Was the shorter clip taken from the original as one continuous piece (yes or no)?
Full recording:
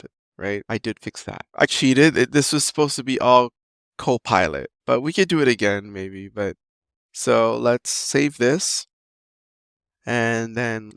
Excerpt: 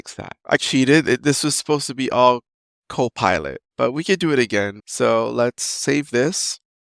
no